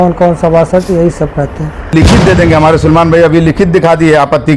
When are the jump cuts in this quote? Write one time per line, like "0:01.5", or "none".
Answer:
0:01.9